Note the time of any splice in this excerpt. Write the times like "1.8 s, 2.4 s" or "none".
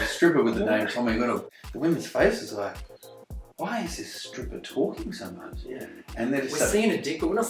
1.5 s